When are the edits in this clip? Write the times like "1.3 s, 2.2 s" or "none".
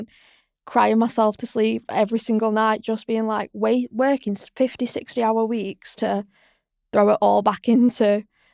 none

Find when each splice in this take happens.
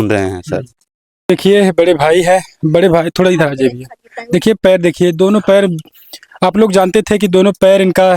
1.3 s

